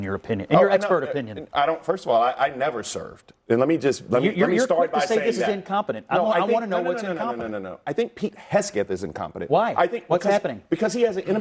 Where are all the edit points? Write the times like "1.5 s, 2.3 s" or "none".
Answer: none